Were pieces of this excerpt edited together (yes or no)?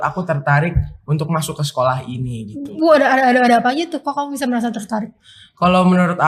no